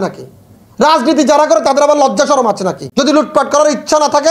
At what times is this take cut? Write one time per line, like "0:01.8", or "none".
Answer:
0:02.8